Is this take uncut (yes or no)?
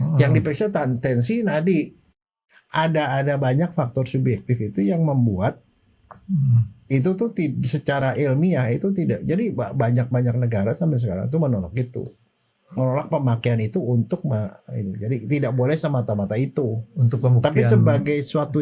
no